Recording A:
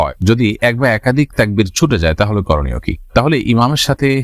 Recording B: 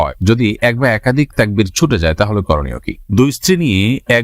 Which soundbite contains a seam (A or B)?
B